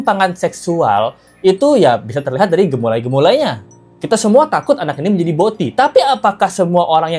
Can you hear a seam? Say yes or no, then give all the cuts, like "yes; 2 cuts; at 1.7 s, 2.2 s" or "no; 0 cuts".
no; 0 cuts